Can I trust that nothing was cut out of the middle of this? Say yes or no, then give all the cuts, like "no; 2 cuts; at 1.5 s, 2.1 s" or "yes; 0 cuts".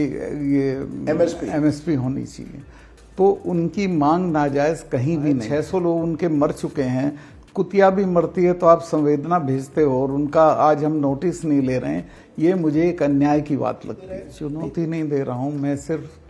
no; 2 cuts; at 5.4 s, 14.3 s